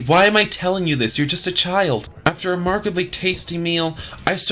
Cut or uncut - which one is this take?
cut